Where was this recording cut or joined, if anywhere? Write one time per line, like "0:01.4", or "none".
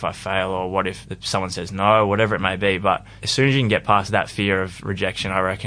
0:01.1
0:04.1

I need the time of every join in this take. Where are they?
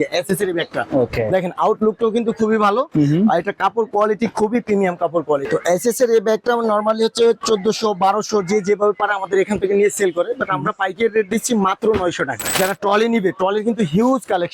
0:05.4
0:12.6

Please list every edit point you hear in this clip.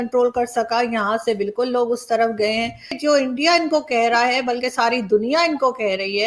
0:02.8

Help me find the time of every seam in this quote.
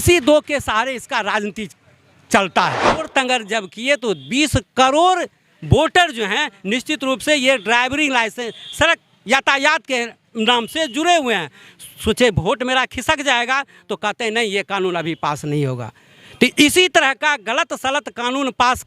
0:03.1

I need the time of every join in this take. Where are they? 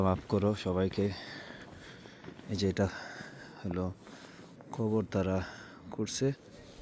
none

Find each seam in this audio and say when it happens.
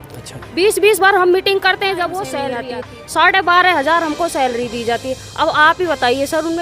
0:02.5

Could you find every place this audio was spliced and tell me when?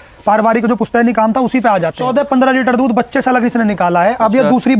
0:02.0

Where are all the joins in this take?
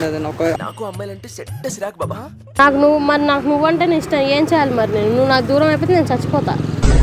0:02.6

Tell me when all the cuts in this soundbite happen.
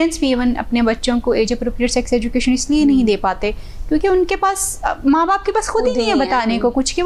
none

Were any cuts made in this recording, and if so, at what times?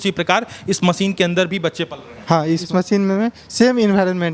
0:02.5

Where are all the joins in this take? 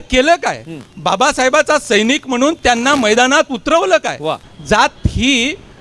0:04.5

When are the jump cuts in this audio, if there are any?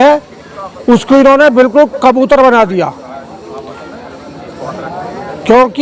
none

